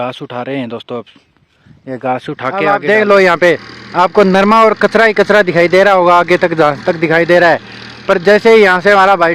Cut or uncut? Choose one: cut